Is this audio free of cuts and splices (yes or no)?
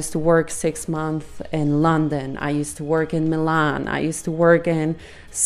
yes